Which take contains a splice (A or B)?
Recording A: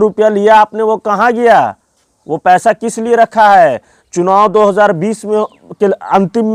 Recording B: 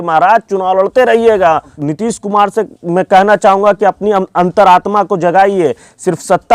B